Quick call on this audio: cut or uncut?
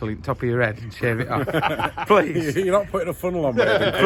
uncut